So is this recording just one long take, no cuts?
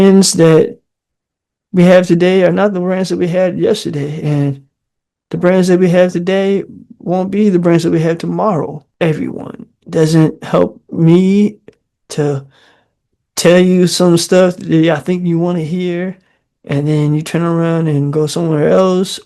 no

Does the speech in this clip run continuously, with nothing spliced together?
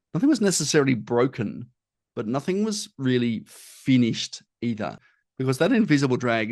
no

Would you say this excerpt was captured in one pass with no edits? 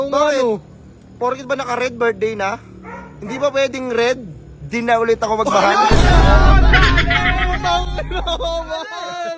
yes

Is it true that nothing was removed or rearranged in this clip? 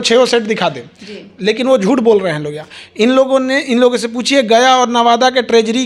yes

